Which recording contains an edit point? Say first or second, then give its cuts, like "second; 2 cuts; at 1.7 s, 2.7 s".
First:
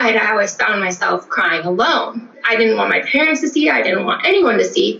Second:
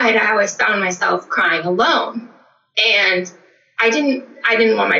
first; 1 cut; at 2.3 s